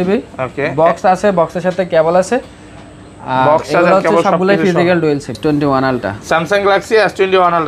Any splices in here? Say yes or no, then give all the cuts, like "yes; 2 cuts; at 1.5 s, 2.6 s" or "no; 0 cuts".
yes; 1 cut; at 5.3 s